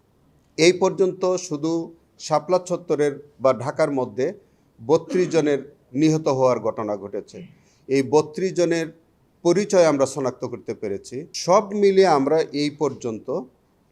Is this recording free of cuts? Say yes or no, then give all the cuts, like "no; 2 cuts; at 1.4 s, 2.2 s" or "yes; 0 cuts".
no; 1 cut; at 11.3 s